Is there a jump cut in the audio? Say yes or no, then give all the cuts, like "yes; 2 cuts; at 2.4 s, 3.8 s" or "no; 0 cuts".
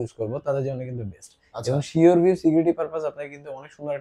no; 0 cuts